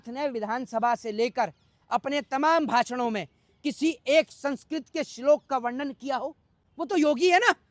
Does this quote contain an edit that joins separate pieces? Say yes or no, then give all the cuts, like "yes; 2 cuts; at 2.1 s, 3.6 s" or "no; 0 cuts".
no; 0 cuts